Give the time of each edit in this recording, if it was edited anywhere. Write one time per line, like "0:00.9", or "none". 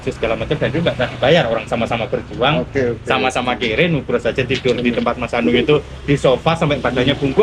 none